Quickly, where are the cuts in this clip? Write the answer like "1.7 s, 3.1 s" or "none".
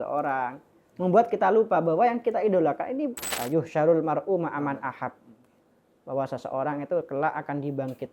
3.3 s